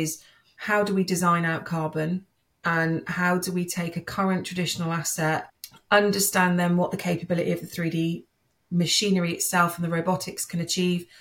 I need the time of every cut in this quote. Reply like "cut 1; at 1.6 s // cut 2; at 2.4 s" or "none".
none